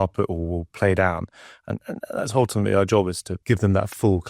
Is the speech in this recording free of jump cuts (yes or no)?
no